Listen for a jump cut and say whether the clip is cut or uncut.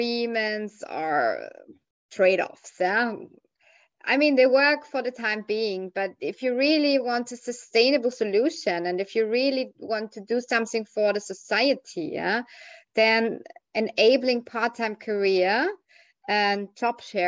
uncut